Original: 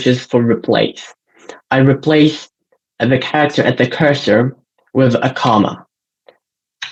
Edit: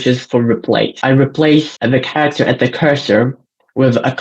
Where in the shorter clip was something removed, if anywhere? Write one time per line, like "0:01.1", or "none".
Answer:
0:00.9
0:01.7